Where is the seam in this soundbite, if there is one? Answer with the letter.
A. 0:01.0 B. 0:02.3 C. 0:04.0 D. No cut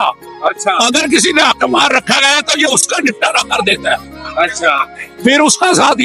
D